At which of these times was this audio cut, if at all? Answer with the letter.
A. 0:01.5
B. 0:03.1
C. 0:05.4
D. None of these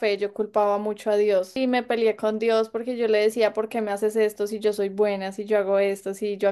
A